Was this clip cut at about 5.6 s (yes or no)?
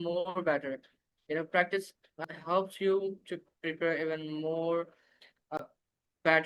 yes